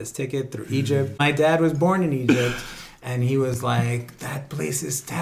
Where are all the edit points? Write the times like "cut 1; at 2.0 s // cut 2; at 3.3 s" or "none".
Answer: cut 1; at 1.2 s